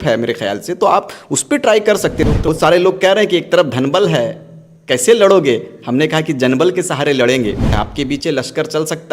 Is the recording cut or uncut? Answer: cut